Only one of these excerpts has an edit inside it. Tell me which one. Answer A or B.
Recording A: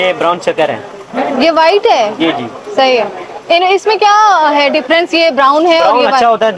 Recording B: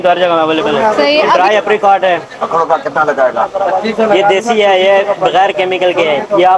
B